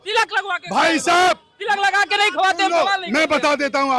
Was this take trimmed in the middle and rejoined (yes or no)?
no